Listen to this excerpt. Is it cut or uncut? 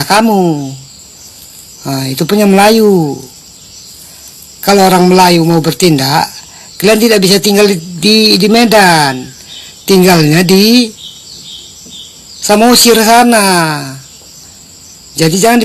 uncut